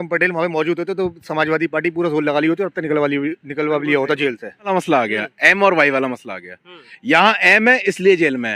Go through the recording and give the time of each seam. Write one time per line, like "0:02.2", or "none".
0:04.7